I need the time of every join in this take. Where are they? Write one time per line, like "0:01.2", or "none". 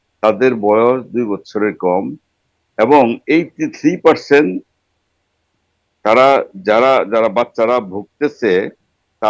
none